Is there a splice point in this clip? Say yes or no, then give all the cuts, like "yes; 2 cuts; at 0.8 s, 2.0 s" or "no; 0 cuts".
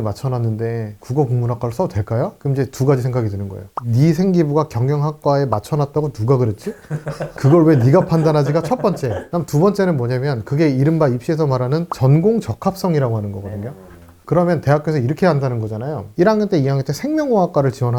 no; 0 cuts